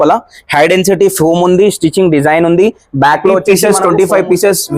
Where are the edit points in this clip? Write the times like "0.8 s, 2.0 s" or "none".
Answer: 3.6 s

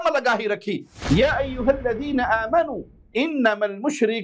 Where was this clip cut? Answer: 0.9 s

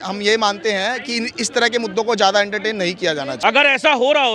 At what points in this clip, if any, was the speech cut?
3.3 s

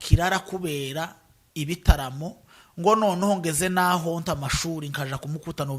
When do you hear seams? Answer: none

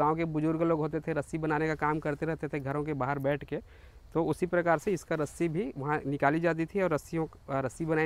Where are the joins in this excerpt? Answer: none

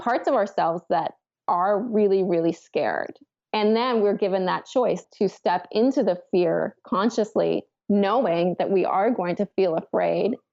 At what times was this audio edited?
5.0 s

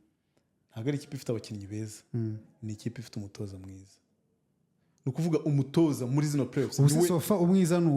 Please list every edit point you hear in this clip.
none

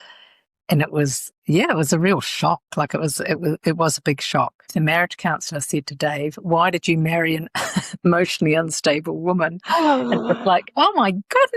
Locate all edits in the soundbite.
4.7 s

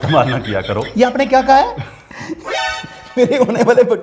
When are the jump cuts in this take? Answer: none

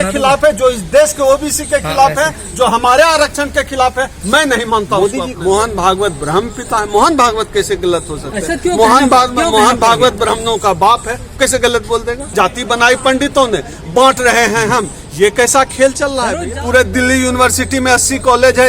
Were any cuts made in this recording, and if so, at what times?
5.3 s, 12.2 s, 16.4 s

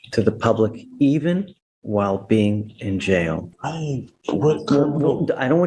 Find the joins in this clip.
3.5 s

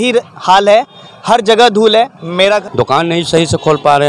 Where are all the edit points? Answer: 2.6 s

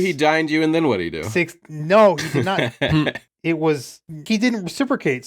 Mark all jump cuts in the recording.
1.2 s, 2.6 s, 4.2 s

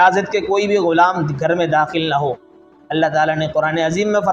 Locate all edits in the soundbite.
2.7 s

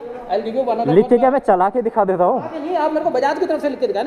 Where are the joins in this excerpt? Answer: none

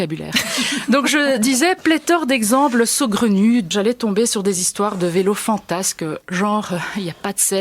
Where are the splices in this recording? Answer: 3.7 s

